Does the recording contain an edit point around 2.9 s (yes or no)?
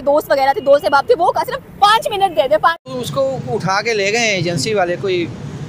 yes